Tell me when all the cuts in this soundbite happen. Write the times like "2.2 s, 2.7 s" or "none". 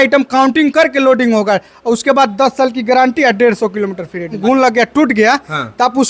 4.4 s